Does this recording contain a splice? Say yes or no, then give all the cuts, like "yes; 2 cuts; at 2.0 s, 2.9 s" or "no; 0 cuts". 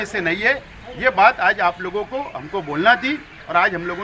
no; 0 cuts